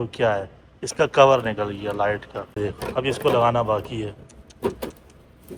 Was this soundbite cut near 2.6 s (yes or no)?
yes